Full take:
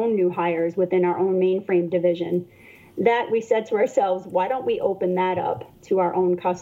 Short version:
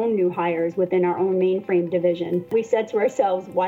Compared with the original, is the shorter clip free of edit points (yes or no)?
no